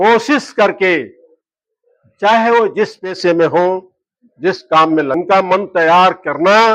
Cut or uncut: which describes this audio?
cut